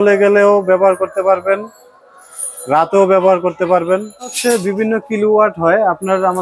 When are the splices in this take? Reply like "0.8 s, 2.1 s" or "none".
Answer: 4.3 s